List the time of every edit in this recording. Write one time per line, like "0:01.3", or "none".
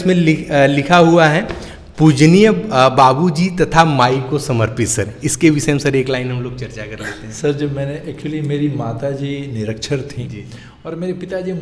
none